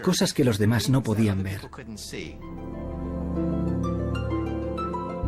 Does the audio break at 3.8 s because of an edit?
yes; 1 cut; at 3.8 s

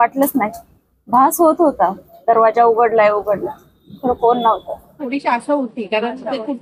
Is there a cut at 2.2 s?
no; 1 cut; at 4.9 s

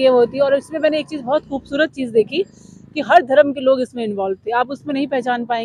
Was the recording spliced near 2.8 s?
no; 0 cuts

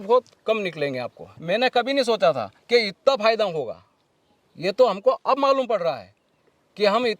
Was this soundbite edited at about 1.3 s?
yes; 1 cut; at 1.3 s

